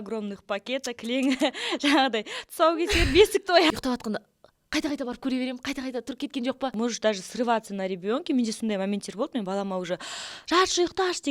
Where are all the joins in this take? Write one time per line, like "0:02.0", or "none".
0:03.7
0:06.7